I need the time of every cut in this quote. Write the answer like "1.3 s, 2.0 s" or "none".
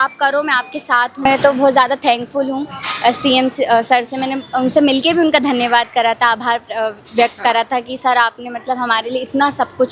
1.2 s